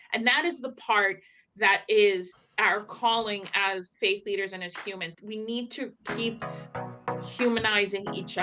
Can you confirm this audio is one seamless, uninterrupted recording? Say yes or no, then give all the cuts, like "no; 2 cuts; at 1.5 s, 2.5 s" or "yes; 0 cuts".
yes; 0 cuts